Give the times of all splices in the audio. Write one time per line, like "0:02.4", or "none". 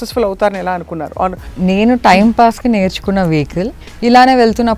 0:01.4
0:03.8